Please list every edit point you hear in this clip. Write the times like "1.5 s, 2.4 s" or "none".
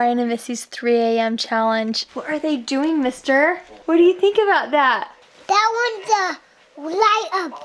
none